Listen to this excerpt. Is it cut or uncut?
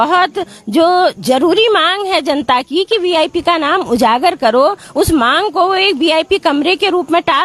uncut